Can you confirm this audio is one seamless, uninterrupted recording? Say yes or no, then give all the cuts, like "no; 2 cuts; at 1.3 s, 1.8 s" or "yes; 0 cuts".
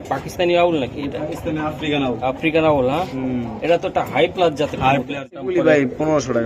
no; 1 cut; at 5.4 s